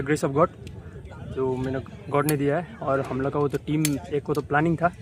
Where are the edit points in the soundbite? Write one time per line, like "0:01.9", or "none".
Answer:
none